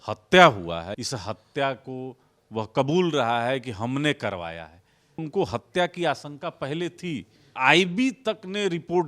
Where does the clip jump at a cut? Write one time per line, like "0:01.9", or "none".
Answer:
0:00.9
0:05.2
0:07.5